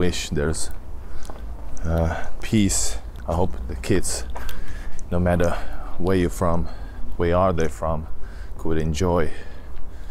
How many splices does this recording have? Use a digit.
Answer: 1